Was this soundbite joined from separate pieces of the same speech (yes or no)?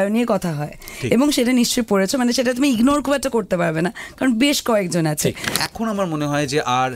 yes